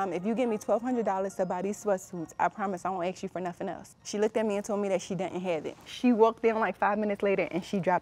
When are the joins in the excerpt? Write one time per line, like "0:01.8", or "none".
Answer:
0:03.9
0:05.8